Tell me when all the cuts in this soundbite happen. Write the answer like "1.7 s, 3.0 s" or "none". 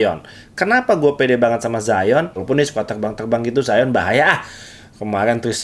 2.4 s